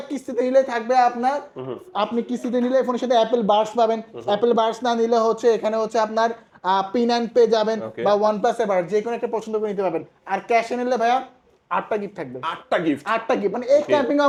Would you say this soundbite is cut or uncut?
uncut